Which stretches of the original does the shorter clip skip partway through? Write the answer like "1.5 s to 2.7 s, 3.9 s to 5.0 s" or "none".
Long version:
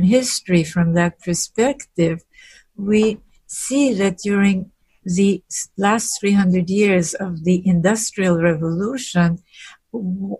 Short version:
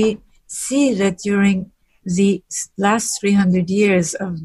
none